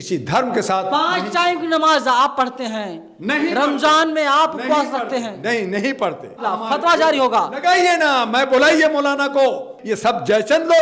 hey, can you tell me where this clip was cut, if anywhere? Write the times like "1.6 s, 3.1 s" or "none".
6.4 s, 9.7 s